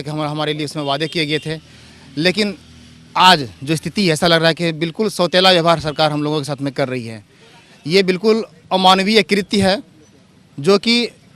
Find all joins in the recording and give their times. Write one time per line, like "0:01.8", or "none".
none